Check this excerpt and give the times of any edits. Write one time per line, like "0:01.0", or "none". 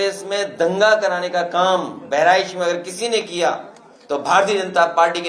none